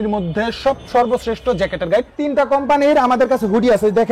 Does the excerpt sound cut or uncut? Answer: cut